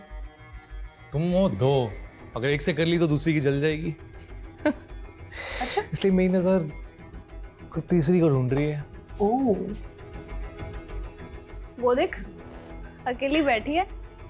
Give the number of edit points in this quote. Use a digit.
0